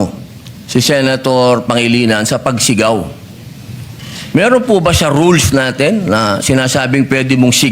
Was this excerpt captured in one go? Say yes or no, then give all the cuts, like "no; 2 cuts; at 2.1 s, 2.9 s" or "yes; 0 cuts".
yes; 0 cuts